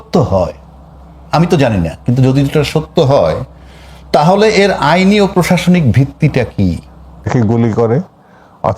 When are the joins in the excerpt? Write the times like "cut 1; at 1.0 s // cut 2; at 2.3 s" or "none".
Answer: cut 1; at 7.3 s